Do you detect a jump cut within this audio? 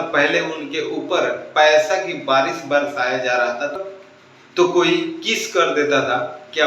yes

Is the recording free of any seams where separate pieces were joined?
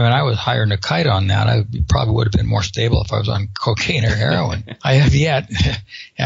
no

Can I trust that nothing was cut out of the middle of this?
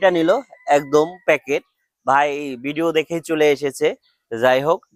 yes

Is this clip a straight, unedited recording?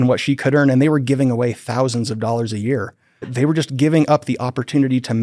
no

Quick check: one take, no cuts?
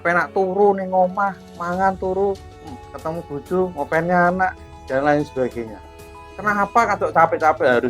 yes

